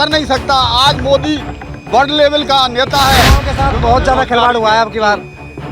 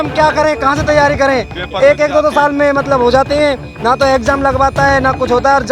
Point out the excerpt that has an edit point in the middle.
first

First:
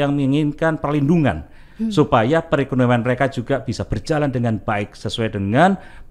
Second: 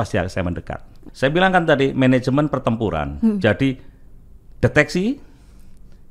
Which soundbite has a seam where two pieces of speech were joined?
second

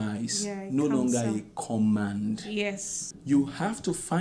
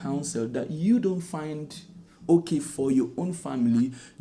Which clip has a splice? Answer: first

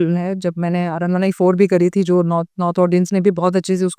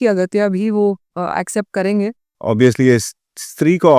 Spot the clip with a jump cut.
second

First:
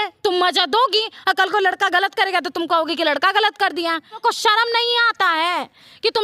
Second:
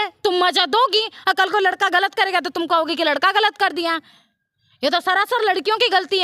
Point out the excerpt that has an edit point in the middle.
first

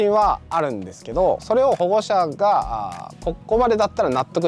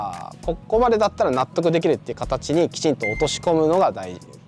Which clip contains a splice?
first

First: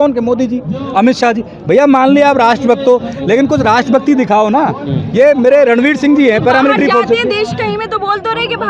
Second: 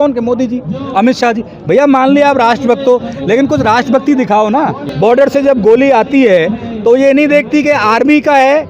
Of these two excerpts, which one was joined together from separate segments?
second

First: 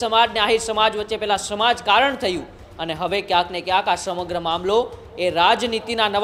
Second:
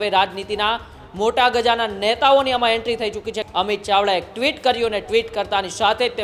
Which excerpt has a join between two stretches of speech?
second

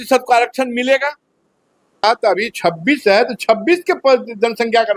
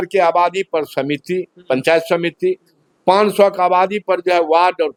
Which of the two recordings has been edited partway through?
first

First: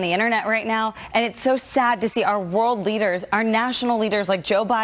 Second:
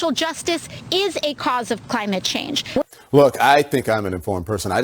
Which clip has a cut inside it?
second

